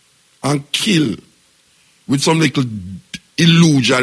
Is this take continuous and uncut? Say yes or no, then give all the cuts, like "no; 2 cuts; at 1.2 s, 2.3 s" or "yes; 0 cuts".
yes; 0 cuts